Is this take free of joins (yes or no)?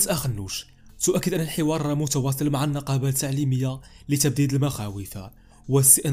yes